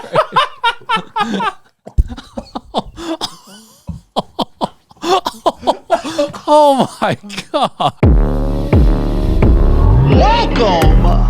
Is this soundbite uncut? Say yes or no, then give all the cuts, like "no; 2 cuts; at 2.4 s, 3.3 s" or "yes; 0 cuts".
no; 1 cut; at 7.9 s